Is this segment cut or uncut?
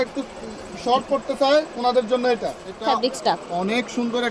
cut